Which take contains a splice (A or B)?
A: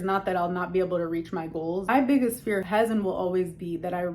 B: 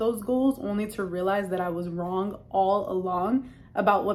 A